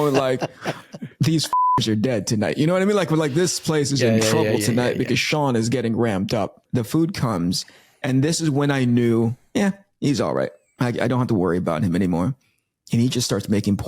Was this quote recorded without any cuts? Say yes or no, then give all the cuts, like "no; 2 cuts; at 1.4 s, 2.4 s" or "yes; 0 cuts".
no; 1 cut; at 6.6 s